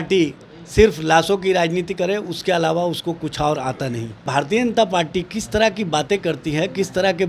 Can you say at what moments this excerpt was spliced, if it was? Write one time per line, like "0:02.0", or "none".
0:04.3